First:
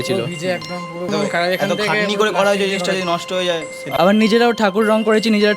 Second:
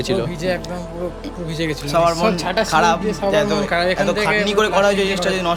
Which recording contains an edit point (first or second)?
first